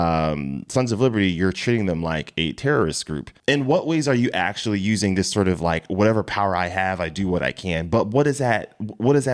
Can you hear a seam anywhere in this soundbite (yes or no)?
no